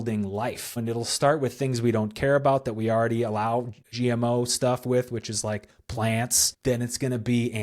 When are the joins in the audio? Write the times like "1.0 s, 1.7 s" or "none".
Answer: 0.8 s, 3.9 s, 6.5 s

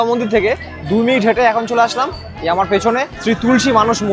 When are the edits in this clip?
3.1 s

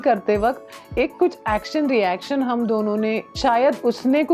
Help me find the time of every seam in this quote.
3.3 s

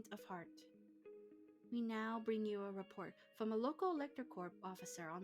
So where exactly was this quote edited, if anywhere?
none

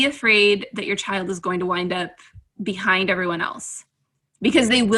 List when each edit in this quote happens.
none

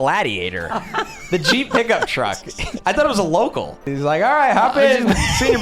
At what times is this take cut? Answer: 3.8 s

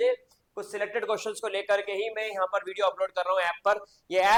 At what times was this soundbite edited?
none

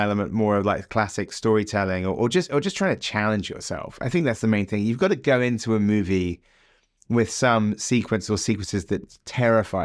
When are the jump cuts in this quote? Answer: none

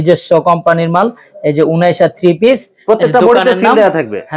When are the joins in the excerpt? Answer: none

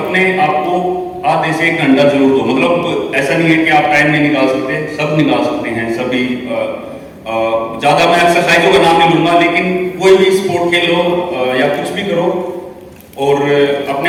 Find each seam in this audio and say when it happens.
none

